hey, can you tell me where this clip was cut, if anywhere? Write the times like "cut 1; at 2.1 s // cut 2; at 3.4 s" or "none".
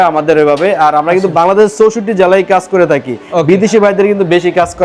none